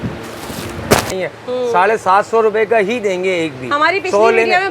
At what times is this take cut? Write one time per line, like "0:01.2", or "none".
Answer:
0:01.1